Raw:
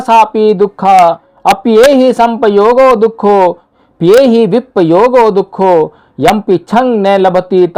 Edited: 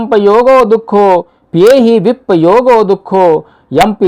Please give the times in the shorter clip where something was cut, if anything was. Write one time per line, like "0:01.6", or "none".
0:01.4